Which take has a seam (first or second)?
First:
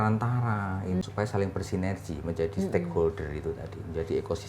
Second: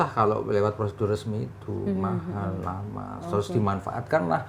first